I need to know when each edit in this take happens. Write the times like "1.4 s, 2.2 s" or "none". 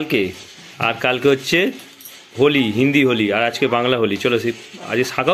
none